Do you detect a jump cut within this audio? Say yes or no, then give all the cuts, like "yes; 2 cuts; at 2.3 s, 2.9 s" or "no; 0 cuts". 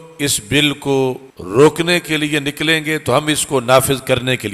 yes; 1 cut; at 1.3 s